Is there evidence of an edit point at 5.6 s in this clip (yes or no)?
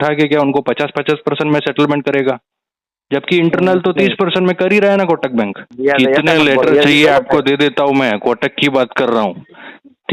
yes